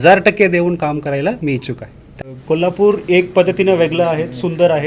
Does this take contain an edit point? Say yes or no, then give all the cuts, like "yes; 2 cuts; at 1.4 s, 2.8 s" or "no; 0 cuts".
yes; 1 cut; at 2.1 s